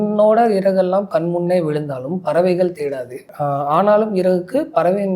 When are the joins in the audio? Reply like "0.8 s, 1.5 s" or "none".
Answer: none

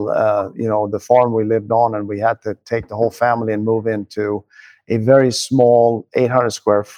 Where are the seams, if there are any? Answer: none

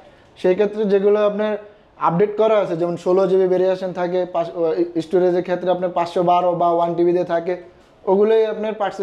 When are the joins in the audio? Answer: none

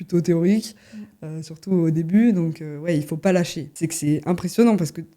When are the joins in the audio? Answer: 3.6 s

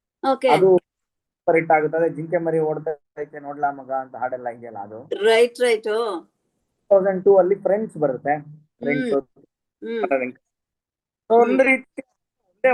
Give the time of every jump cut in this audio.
none

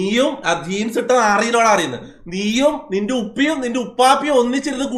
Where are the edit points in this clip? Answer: none

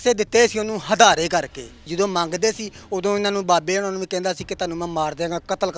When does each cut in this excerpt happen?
1.8 s

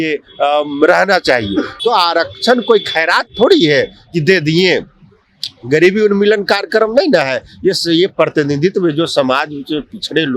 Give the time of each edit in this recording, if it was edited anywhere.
1.7 s

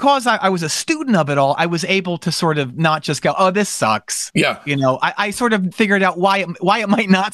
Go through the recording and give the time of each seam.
5.7 s

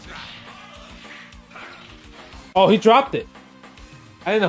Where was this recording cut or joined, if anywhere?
none

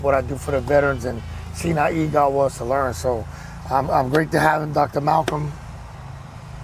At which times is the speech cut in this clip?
none

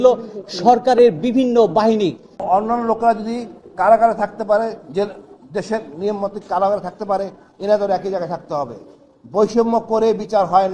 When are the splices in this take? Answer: 2.3 s

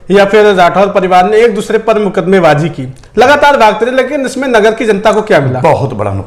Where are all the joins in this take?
none

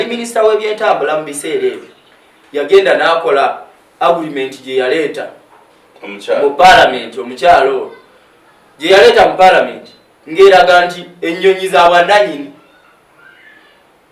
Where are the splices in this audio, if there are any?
none

